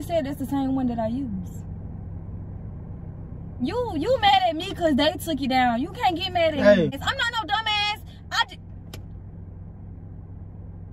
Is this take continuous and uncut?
no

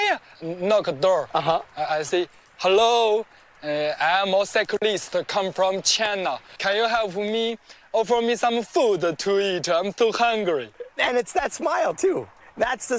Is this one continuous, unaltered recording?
yes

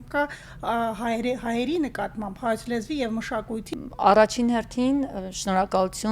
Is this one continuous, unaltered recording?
yes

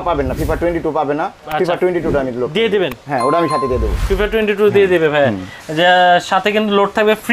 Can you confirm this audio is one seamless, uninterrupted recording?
yes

